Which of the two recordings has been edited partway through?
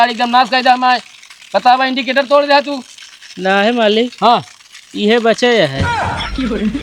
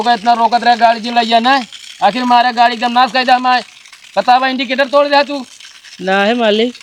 first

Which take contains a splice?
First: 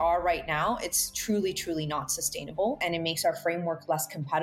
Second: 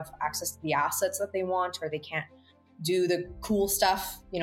first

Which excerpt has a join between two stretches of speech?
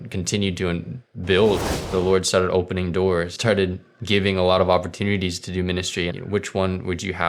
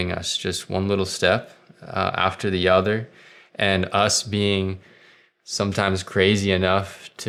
first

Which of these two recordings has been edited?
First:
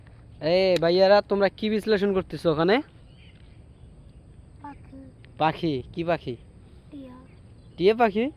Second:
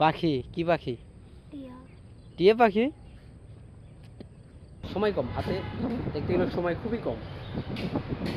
second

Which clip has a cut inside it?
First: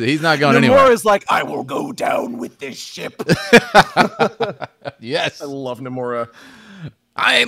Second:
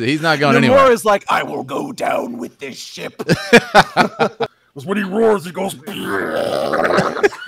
second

